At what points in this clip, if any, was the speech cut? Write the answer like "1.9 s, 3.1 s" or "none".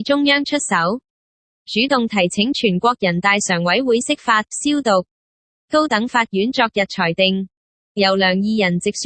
4.7 s